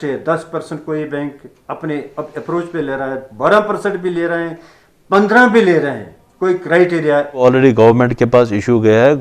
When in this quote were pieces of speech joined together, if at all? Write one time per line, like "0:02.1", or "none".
0:07.4